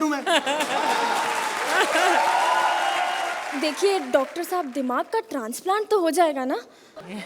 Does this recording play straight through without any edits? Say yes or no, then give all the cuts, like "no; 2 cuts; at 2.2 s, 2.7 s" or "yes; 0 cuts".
yes; 0 cuts